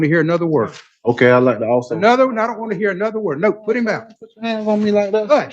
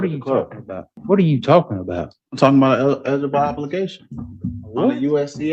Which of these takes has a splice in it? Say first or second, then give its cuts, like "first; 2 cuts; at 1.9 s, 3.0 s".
second; 1 cut; at 0.9 s